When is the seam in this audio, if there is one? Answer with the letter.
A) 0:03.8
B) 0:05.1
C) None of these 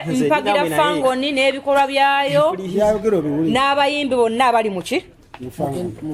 C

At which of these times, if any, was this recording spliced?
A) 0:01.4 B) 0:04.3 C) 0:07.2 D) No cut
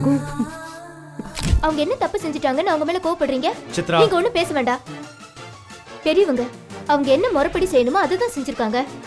A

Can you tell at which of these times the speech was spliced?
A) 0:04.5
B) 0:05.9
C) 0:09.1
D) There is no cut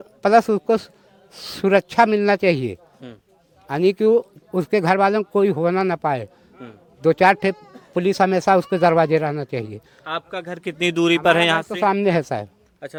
D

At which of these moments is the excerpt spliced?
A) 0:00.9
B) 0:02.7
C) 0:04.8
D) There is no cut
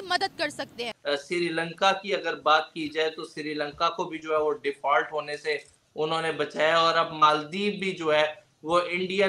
A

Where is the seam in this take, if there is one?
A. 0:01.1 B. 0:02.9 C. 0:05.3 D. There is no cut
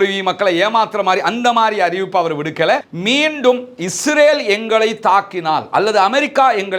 B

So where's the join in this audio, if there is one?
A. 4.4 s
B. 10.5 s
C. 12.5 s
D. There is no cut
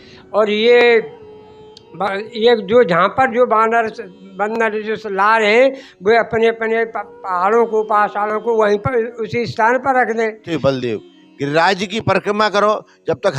B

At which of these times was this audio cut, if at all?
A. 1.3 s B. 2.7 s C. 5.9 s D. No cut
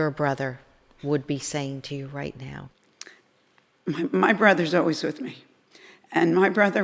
B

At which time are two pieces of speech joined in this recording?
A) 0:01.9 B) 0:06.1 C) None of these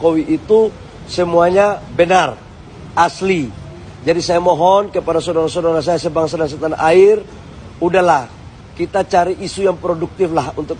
C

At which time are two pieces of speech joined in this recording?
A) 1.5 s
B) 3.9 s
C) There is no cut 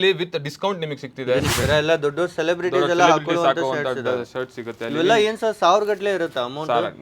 A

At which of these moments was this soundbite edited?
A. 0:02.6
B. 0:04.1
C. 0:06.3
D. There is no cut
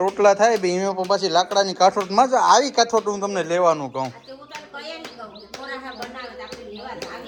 D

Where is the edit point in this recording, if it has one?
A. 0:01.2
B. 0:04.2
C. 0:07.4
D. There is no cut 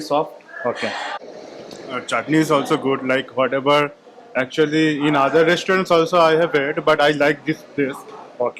A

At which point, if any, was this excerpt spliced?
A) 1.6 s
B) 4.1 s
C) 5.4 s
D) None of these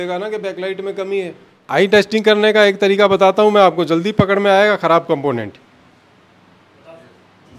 A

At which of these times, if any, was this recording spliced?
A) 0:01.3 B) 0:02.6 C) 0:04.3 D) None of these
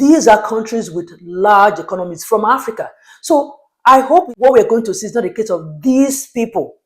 C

